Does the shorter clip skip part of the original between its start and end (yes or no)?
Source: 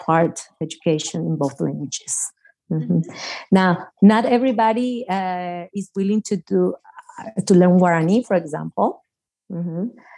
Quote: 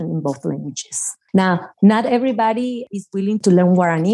yes